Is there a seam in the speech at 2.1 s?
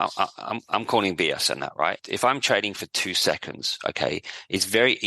yes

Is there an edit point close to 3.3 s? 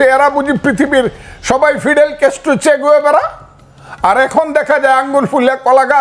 no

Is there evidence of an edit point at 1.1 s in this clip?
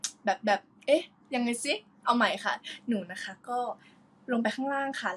yes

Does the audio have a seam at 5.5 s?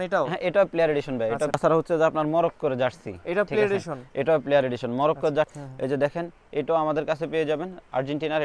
yes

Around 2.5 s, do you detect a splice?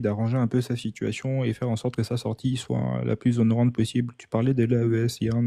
no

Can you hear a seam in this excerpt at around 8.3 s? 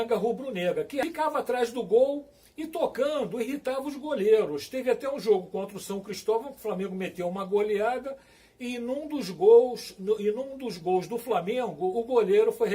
no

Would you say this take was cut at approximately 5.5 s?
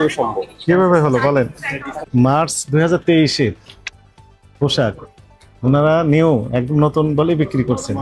no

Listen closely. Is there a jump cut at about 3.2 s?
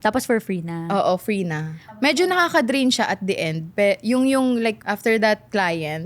no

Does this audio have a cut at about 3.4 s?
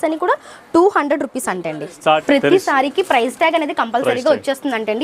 no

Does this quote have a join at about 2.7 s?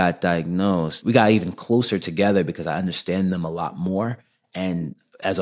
no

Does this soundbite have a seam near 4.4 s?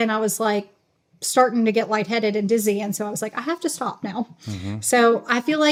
no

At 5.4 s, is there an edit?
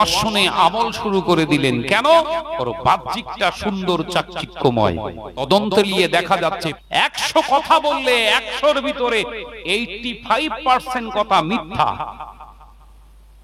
yes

